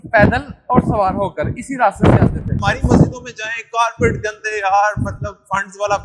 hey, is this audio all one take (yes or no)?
no